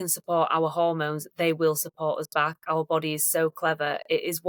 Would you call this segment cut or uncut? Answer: uncut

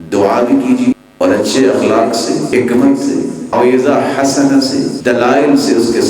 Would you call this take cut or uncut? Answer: cut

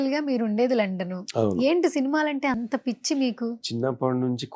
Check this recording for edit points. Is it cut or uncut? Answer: uncut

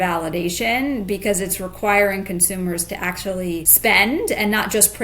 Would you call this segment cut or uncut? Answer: cut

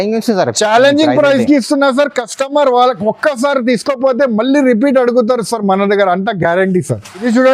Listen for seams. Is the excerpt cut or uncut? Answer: uncut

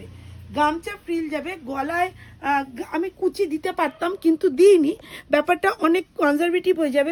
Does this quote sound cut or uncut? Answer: uncut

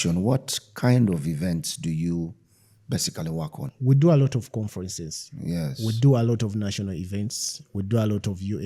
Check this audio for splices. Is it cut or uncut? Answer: uncut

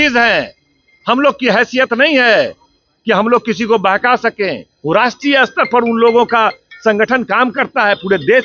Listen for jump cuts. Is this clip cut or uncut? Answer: uncut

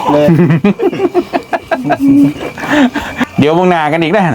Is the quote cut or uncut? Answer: cut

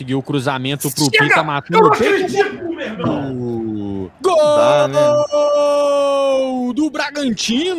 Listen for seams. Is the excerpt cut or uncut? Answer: uncut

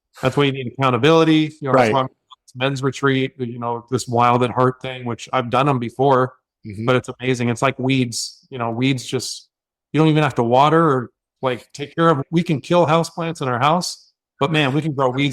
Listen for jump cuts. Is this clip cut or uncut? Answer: cut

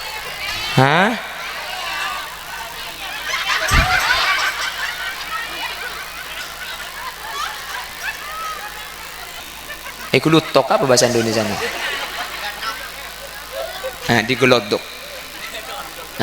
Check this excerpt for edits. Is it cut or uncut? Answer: cut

